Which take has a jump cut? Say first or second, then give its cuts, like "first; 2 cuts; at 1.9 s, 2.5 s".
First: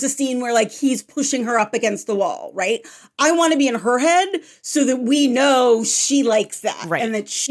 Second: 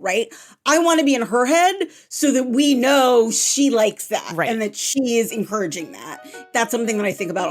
second; 1 cut; at 6.5 s